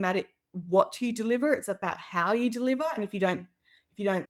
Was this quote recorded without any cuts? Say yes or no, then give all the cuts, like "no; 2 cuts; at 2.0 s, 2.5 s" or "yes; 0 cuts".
yes; 0 cuts